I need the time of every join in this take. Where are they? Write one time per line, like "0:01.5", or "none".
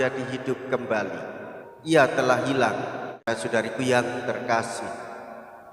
0:03.2